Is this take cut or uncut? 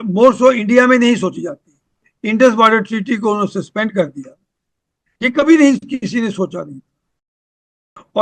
cut